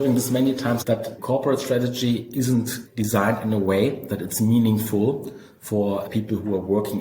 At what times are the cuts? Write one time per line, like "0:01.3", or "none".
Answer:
0:01.0
0:02.8
0:06.1